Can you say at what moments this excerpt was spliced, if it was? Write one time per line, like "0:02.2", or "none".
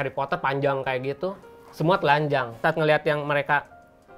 0:02.6